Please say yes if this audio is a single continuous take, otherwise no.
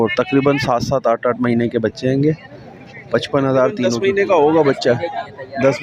no